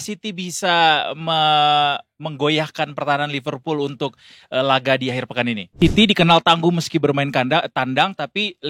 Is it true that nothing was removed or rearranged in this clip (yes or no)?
no